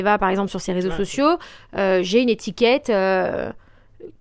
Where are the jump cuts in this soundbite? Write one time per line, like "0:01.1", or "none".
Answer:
none